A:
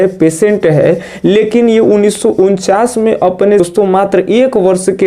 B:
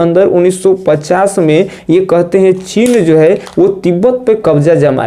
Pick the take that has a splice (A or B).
A